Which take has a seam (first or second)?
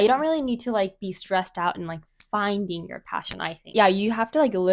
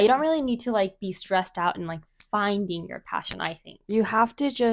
first